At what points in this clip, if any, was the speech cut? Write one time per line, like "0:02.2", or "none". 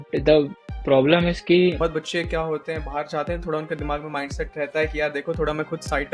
0:01.8